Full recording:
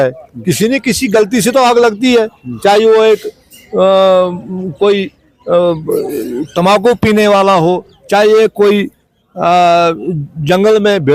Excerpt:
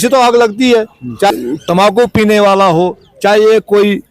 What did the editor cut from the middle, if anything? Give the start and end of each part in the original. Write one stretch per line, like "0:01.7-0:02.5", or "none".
0:02.7-0:06.2